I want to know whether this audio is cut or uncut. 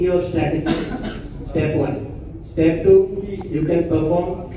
uncut